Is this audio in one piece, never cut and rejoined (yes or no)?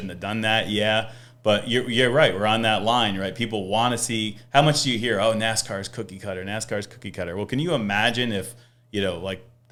yes